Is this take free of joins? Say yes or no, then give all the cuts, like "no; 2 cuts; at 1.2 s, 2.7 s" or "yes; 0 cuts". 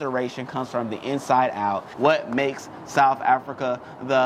no; 1 cut; at 1.9 s